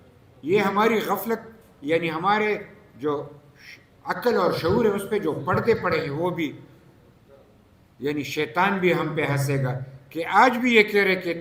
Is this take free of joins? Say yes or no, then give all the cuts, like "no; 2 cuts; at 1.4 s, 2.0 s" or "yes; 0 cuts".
yes; 0 cuts